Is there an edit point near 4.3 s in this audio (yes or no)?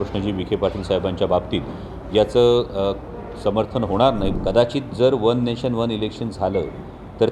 yes